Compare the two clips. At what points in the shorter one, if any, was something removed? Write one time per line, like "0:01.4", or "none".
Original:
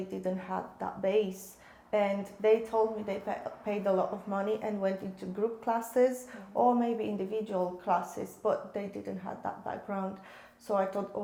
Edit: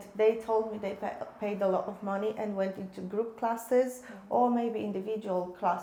none